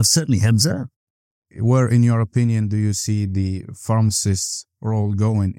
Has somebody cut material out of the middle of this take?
yes; 1 cut; at 1.0 s

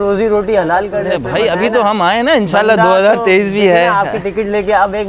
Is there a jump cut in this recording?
no; 0 cuts

